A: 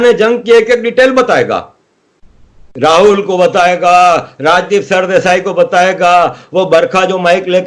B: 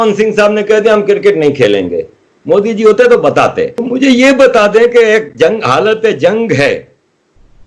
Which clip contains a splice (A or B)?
B